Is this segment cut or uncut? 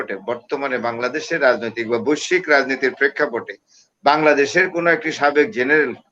uncut